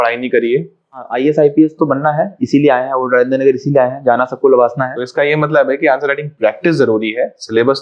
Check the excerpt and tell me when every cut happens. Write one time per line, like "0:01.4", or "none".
0:01.1
0:05.0